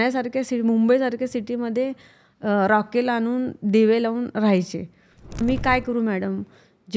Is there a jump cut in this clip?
yes; 1 cut; at 5.4 s

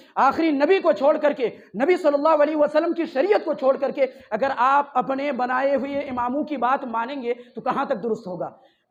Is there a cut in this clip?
no; 0 cuts

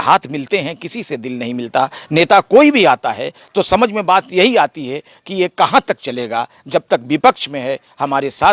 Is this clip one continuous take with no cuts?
yes; 0 cuts

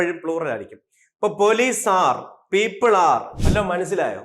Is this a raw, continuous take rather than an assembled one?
no; 1 cut; at 3.3 s

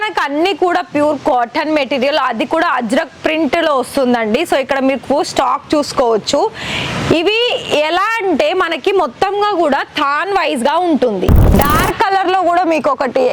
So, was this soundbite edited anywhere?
yes; 1 cut; at 11.5 s

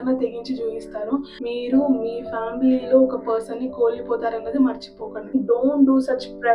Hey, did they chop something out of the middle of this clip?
yes; 2 cuts; at 1.3 s, 5.3 s

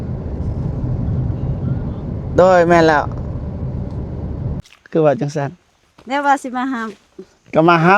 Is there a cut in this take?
yes; 1 cut; at 4.7 s

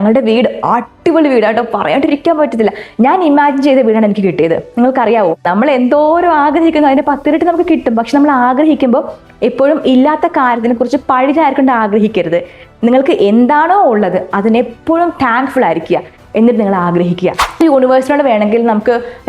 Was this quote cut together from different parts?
yes; 2 cuts; at 5.4 s, 17.6 s

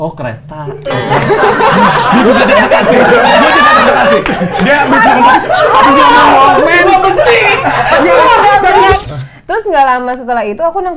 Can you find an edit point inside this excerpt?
yes; 1 cut; at 9.0 s

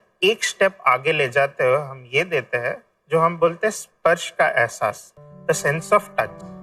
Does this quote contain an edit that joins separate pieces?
no; 0 cuts

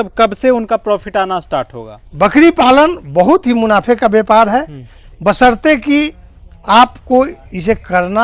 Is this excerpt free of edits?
no; 1 cut; at 2.0 s

